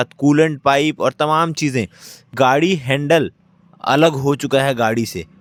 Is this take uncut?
yes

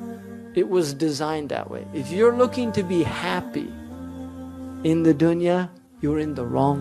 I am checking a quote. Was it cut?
yes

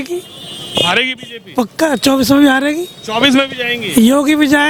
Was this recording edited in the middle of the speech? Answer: no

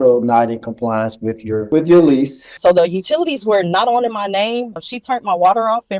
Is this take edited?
yes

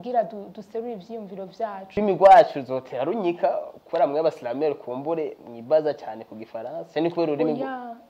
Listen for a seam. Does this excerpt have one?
yes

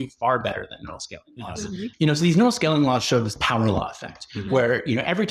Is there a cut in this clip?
no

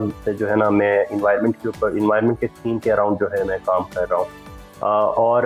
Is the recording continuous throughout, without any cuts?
yes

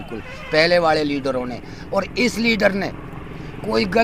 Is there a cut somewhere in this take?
no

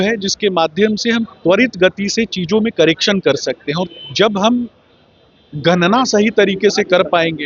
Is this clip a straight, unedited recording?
yes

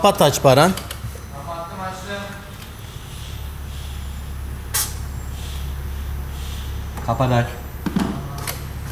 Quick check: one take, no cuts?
yes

